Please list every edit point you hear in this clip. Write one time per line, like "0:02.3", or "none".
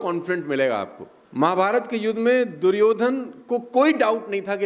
none